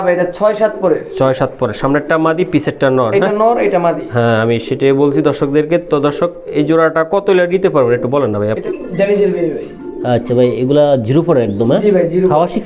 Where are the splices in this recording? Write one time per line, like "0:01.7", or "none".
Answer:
0:08.6